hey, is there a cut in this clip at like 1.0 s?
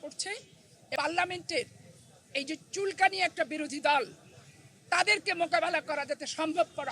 yes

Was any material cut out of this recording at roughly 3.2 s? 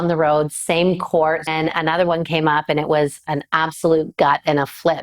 no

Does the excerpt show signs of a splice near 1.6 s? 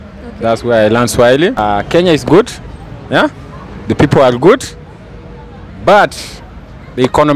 yes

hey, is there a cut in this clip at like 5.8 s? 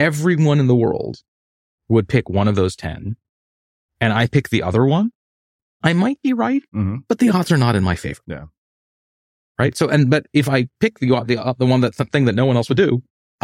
yes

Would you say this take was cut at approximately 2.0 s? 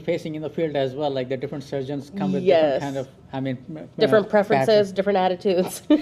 no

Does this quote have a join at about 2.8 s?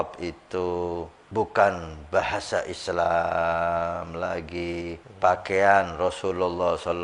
no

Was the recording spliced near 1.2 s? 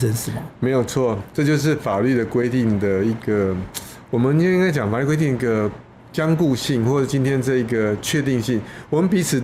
no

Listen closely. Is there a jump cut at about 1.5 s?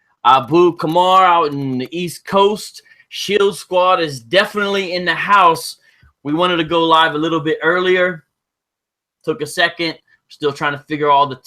yes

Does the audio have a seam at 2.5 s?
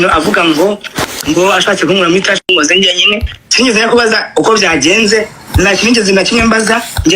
yes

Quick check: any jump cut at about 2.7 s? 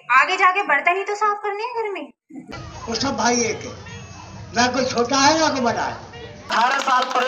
yes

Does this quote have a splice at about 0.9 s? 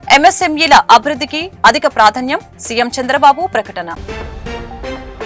no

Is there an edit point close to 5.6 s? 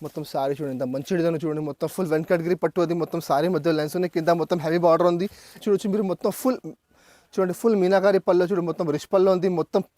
yes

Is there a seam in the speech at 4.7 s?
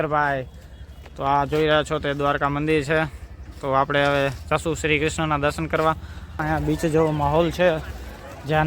no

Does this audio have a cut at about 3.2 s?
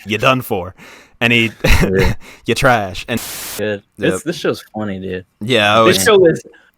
yes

